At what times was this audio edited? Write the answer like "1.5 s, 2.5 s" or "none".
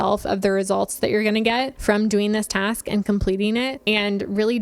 1.7 s, 3.8 s